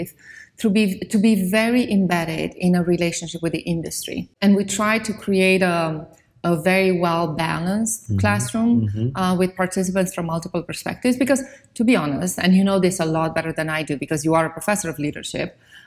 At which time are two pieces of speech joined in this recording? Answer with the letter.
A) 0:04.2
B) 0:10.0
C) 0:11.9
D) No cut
A